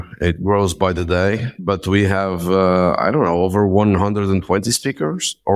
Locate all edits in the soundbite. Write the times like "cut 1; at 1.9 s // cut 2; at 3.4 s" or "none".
none